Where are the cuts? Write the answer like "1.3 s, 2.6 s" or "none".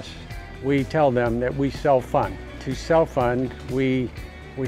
2.7 s